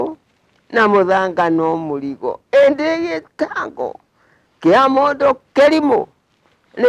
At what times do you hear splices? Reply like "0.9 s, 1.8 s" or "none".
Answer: none